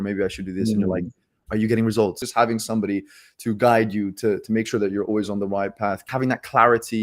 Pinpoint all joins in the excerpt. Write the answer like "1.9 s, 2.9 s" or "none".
2.2 s, 6.0 s